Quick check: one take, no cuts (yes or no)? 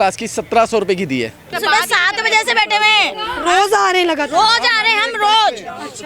no